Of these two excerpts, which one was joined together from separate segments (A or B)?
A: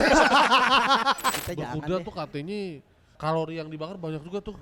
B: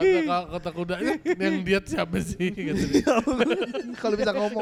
A